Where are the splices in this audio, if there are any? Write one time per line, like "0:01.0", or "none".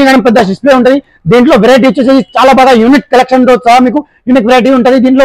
none